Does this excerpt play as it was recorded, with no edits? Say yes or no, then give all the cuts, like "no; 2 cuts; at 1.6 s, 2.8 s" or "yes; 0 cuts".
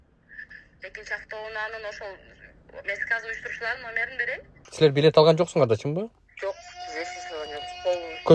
no; 1 cut; at 4.6 s